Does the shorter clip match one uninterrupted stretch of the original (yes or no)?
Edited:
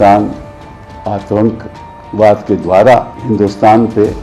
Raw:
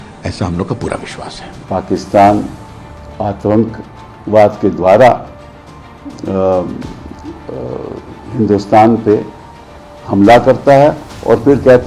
no